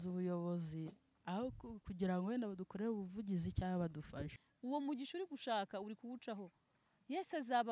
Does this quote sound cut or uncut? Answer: cut